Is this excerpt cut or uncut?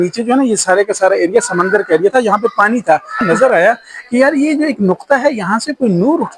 cut